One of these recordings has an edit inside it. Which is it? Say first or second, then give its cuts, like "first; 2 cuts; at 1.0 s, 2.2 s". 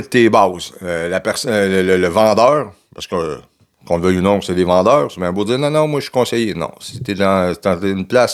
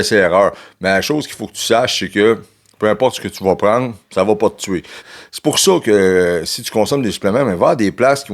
second; 1 cut; at 5.0 s